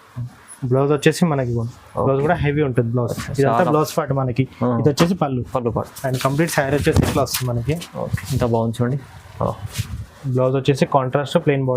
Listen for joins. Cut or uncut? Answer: cut